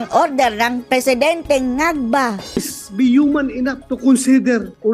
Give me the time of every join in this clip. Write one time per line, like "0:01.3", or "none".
0:02.7